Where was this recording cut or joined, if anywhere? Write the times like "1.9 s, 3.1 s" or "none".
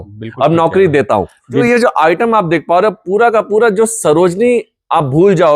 1.5 s